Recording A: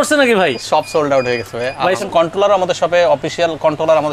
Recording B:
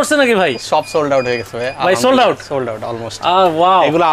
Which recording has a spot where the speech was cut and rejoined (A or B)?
A